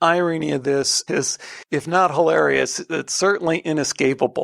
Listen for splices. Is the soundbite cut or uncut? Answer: cut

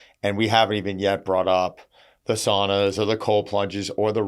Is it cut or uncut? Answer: uncut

